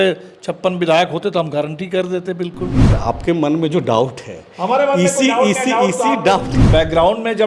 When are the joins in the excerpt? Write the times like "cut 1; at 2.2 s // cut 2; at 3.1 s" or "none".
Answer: cut 1; at 2.9 s // cut 2; at 6.6 s